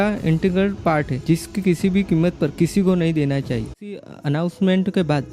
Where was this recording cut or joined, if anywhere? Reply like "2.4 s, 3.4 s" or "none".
3.8 s